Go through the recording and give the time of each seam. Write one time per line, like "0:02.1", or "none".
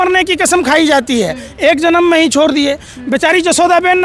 none